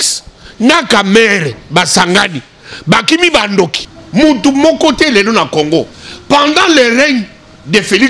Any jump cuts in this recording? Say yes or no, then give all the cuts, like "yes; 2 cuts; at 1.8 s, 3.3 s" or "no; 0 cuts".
yes; 1 cut; at 3.9 s